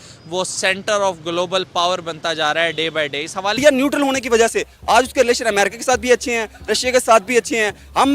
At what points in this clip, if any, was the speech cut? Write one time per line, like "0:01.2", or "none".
0:03.6